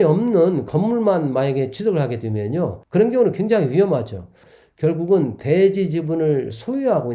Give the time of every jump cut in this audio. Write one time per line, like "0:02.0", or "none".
0:02.8
0:04.4